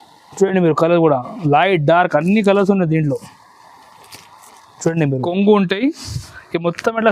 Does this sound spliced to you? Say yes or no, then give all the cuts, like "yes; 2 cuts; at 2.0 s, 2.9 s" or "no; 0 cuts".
yes; 1 cut; at 5.2 s